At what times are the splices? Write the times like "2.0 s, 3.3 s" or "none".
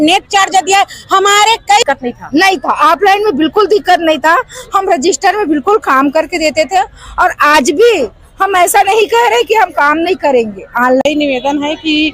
1.8 s, 11.0 s

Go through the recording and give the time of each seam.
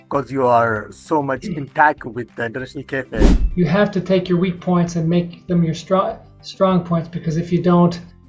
3.4 s

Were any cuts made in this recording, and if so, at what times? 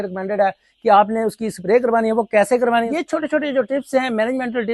2.9 s

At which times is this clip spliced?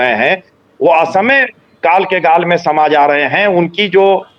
none

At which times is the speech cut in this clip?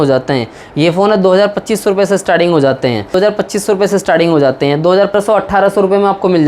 3.1 s, 5.1 s

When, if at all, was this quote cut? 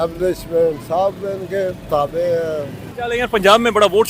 2.8 s

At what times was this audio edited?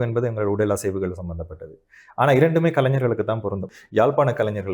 3.7 s

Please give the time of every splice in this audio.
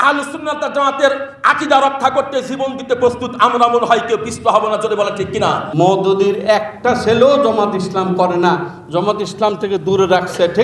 5.7 s

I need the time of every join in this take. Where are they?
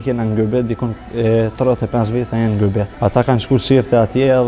2.9 s

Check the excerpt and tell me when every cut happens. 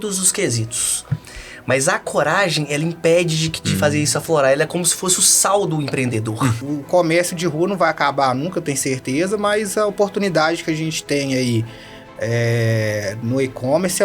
6.6 s

